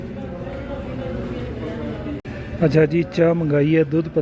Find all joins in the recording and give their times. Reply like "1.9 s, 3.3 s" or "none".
2.2 s